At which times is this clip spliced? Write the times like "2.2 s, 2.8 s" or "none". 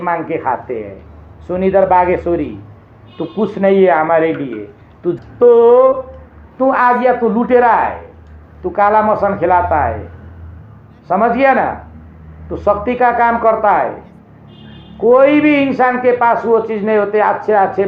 5.1 s